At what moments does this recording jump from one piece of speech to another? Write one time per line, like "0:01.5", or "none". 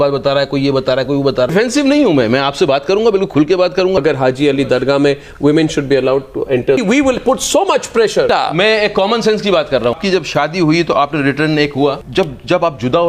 0:01.5
0:04.0
0:06.8
0:08.3
0:10.0
0:12.0